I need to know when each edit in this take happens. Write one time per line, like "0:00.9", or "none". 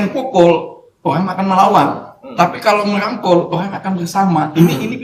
none